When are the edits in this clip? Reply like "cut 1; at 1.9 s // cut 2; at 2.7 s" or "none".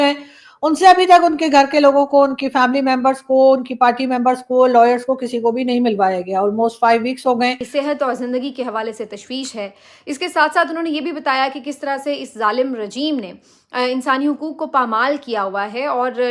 cut 1; at 7.6 s